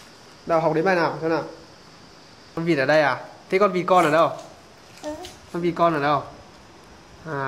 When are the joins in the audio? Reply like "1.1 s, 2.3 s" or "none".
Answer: 2.4 s